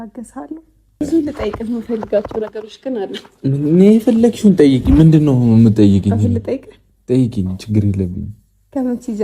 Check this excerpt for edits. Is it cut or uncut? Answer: cut